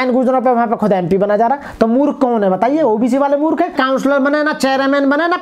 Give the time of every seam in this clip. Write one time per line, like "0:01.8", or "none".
0:03.8

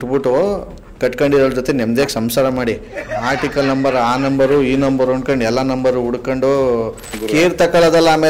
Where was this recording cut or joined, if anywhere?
0:07.1

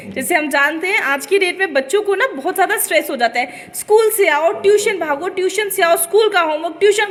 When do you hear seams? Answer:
none

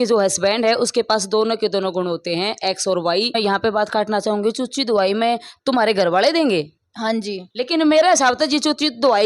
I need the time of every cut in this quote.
0:03.4

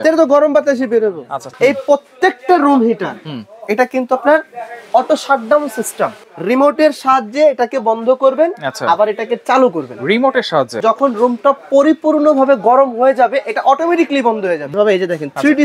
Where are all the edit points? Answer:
0:01.5
0:06.2
0:10.8
0:14.7

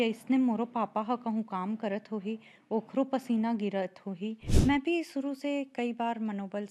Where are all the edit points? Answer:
0:04.4

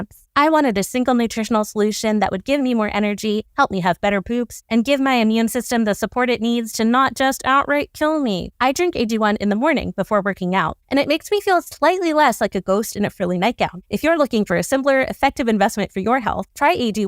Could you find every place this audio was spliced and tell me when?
0:08.5
0:13.8

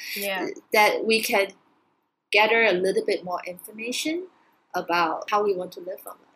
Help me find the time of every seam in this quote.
0:05.2

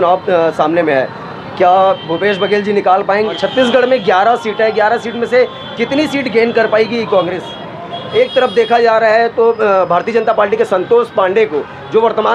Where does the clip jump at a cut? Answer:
0:03.3
0:08.0

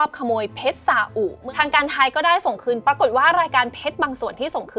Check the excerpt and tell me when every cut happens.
0:01.4
0:02.8

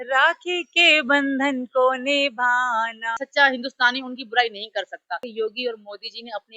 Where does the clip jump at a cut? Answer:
0:03.2
0:05.3

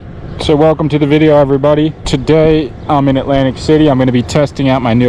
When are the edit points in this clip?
0:02.1

